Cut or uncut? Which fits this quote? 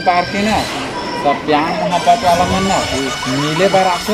uncut